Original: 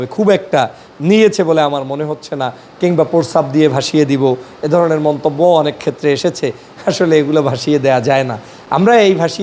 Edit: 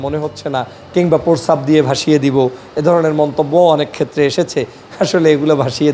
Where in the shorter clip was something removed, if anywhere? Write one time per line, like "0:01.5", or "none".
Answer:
none